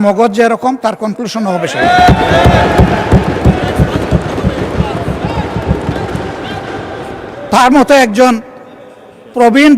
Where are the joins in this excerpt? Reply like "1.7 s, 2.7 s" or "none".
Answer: none